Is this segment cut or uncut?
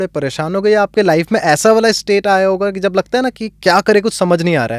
uncut